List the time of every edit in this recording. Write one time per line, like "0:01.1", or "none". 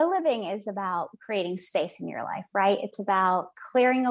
none